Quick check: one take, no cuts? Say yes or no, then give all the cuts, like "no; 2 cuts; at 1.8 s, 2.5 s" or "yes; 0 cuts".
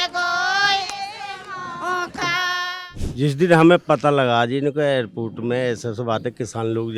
no; 1 cut; at 2.7 s